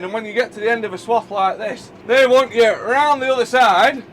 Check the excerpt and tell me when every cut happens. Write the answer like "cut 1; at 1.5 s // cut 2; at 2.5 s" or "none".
cut 1; at 1.9 s